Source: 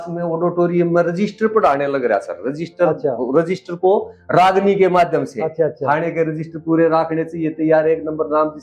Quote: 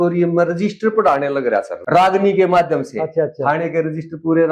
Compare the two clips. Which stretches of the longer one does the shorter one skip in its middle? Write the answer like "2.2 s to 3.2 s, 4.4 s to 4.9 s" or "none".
2.3 s to 4.2 s